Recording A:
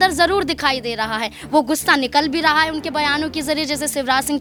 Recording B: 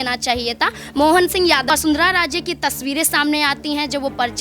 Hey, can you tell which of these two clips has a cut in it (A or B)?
B